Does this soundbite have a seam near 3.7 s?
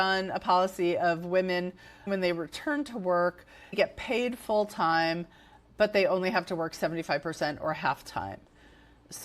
no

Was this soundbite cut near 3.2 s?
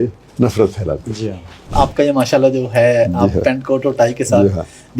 no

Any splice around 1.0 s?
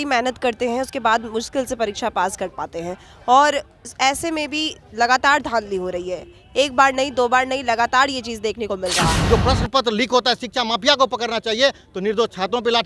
no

